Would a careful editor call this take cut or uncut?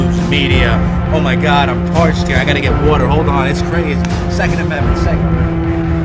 cut